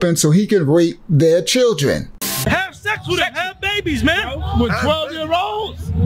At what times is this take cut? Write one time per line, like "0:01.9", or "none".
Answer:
0:02.1